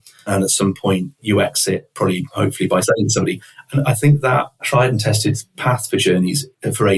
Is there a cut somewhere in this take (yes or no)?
yes